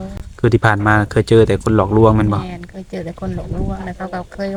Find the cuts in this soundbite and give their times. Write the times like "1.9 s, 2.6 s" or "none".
none